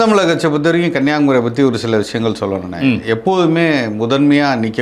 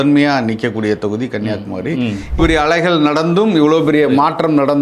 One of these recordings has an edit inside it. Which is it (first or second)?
second